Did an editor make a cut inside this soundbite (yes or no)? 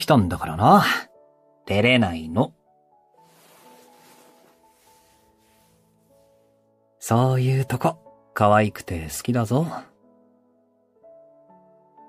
yes